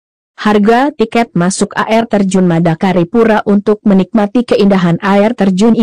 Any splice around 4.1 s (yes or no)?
yes